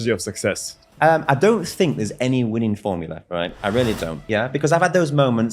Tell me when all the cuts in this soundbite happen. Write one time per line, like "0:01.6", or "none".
0:00.9
0:04.2